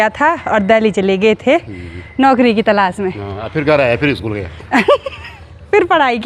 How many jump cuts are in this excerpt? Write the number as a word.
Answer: zero